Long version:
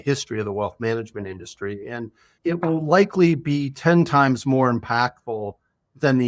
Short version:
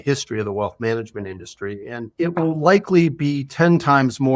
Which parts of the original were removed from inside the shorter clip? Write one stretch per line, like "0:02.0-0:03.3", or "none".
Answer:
0:02.0-0:02.3